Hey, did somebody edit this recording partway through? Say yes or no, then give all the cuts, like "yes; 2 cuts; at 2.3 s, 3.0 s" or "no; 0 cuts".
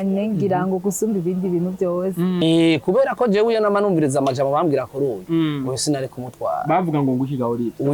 yes; 1 cut; at 2.4 s